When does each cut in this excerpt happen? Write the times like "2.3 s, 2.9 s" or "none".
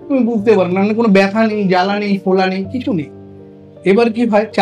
none